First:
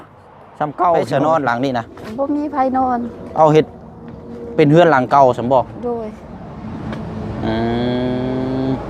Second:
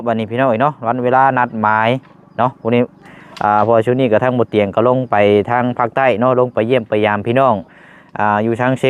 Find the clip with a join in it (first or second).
first